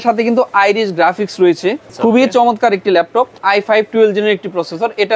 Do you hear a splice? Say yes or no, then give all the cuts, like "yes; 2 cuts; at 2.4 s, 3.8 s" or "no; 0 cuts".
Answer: yes; 2 cuts; at 1.9 s, 3.4 s